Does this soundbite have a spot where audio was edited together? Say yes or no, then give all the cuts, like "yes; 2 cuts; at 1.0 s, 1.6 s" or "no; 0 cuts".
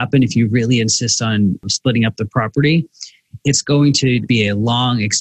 yes; 2 cuts; at 1.7 s, 4.3 s